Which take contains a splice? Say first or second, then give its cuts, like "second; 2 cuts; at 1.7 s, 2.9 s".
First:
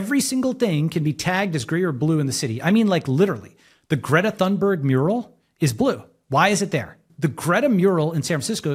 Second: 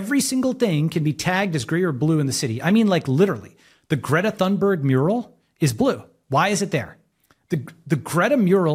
first; 1 cut; at 7.0 s